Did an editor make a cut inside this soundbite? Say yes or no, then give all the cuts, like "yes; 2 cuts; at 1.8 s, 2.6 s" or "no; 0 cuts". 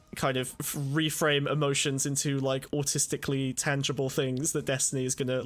no; 0 cuts